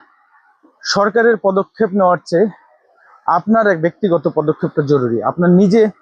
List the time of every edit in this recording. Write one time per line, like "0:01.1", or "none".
none